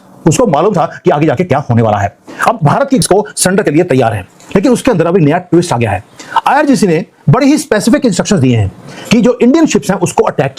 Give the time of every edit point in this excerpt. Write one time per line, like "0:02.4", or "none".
0:03.0